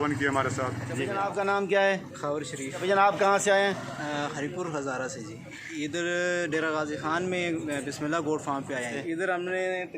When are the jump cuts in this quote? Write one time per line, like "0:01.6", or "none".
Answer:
0:01.0
0:02.8
0:05.5
0:09.0